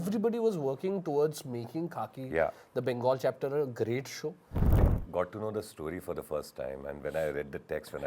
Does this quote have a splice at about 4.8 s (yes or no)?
yes